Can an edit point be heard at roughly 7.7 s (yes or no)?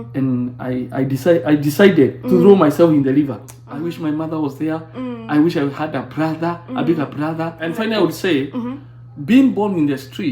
yes